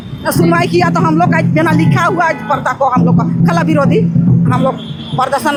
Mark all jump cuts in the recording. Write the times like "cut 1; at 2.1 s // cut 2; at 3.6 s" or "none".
none